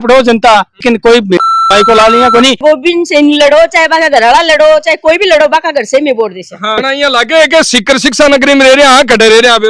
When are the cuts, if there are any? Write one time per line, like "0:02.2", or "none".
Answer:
0:00.8
0:02.6
0:06.8